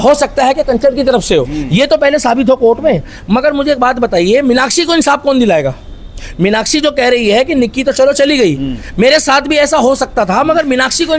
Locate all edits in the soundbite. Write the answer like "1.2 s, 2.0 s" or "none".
none